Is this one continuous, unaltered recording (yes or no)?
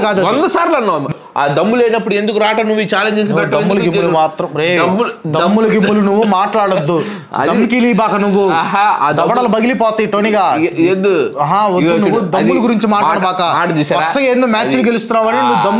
no